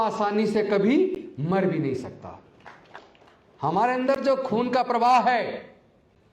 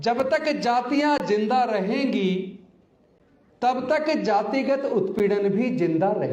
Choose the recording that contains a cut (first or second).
first